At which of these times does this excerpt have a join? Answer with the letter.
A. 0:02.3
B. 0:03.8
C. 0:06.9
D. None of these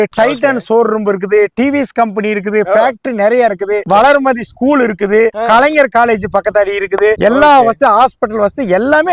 B